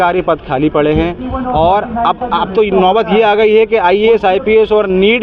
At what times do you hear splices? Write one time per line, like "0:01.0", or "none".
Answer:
none